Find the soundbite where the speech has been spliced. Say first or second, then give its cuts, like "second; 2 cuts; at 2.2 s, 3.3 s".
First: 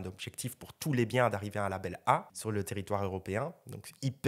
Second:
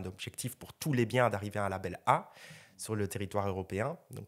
first; 1 cut; at 2.3 s